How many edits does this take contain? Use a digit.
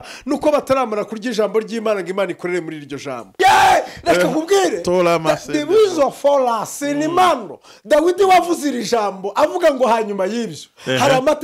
1